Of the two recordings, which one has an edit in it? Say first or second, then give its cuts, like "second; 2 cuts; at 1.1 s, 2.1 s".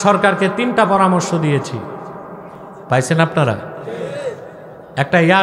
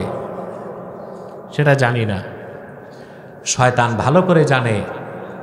first; 1 cut; at 2.7 s